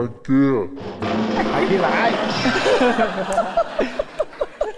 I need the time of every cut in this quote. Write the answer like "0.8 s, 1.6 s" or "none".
none